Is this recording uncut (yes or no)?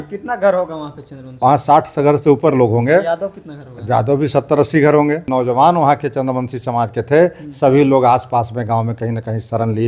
no